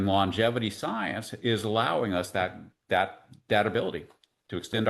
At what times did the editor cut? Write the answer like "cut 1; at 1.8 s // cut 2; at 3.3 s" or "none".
none